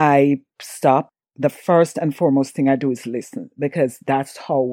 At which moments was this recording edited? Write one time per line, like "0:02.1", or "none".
0:01.2